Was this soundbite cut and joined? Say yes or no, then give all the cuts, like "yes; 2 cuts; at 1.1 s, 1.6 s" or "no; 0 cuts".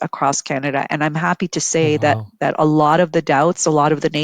no; 0 cuts